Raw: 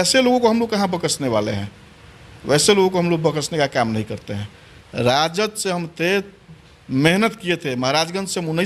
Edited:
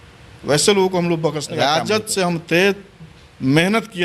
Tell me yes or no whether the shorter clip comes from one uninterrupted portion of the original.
no